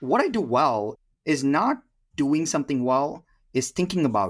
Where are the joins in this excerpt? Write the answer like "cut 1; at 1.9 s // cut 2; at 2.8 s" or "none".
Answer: cut 1; at 1.0 s // cut 2; at 2.0 s

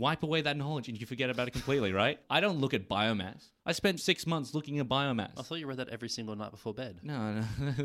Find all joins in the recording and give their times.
cut 1; at 2.2 s // cut 2; at 4.0 s

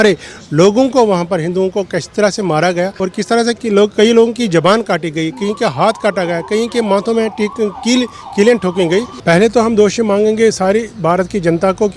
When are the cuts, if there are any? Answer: cut 1; at 2.9 s // cut 2; at 9.1 s

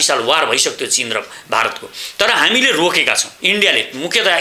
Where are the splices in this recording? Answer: cut 1; at 3.4 s

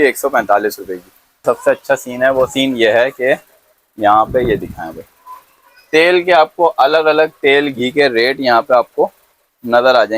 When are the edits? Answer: cut 1; at 1.4 s

